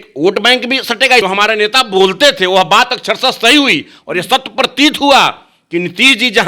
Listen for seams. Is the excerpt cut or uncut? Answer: cut